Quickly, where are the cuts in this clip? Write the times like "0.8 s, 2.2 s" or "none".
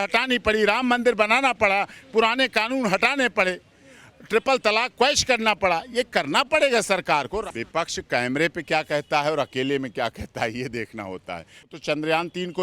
7.5 s, 11.7 s